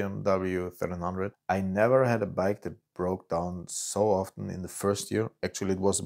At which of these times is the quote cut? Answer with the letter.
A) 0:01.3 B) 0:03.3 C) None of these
A